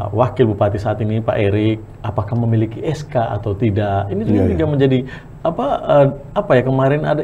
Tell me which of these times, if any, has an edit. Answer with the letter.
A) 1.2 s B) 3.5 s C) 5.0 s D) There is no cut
D